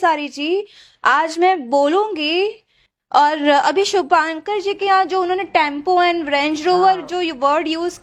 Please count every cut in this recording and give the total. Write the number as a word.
zero